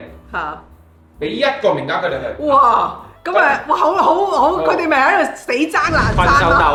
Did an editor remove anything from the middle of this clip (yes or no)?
no